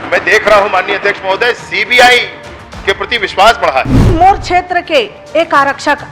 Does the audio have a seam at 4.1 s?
yes; 1 cut; at 4.1 s

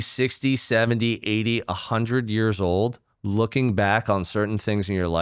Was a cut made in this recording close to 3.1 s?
no; 0 cuts

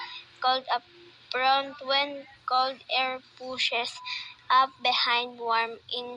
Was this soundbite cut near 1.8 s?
yes; 1 cut; at 1.8 s

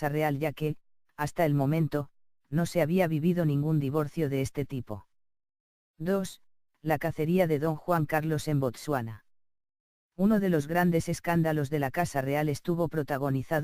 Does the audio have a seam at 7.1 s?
no; 1 cut; at 1.7 s

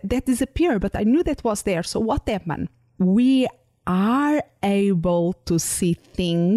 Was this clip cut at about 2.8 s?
yes; 1 cut; at 2.8 s

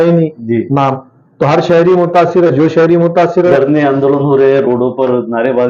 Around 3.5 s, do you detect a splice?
yes; 1 cut; at 3.5 s

